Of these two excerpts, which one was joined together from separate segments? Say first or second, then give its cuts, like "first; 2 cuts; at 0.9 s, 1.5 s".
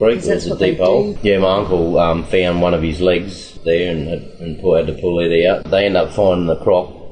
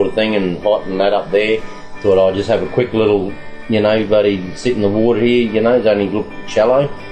first; 3 cuts; at 1.1 s, 3.4 s, 5.6 s